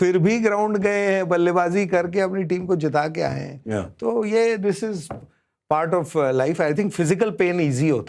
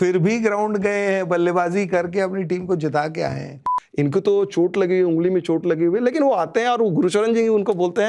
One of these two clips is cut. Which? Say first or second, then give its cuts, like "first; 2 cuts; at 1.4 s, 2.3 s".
second; 1 cut; at 3.6 s